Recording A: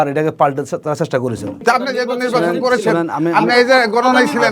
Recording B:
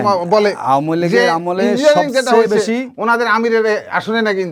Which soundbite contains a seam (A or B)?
A